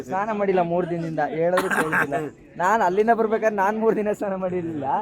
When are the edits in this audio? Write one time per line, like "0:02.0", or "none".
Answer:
none